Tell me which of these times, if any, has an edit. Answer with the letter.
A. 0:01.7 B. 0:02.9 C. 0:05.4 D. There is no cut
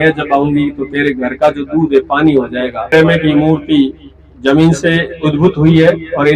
B